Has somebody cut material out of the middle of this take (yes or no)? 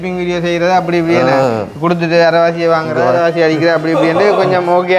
no